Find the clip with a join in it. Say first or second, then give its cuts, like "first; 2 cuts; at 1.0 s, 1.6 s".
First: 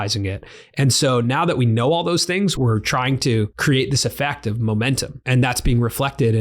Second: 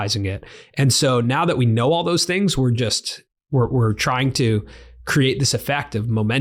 first; 3 cuts; at 2.6 s, 3.5 s, 5.2 s